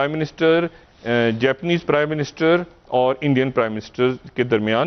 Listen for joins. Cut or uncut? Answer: uncut